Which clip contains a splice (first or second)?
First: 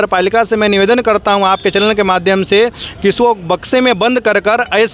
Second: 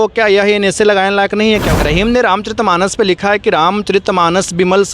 second